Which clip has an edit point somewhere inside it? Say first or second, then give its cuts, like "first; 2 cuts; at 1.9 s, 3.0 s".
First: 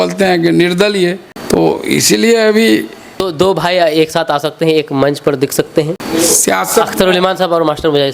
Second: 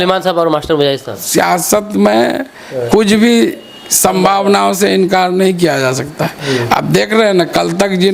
first; 3 cuts; at 1.3 s, 3.3 s, 6.0 s